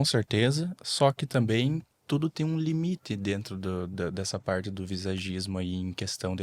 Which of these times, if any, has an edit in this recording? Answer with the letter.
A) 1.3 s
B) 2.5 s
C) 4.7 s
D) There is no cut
D